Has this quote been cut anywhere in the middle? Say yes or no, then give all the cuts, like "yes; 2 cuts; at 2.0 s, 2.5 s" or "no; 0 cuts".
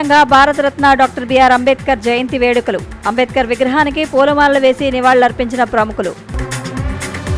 no; 0 cuts